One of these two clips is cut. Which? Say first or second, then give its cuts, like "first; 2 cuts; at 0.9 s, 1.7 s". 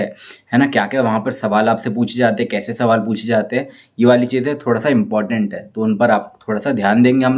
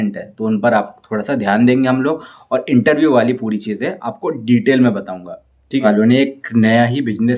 second; 1 cut; at 5.8 s